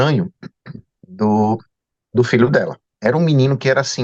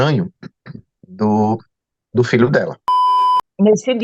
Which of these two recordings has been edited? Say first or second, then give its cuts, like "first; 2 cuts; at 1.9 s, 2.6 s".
second; 1 cut; at 3.0 s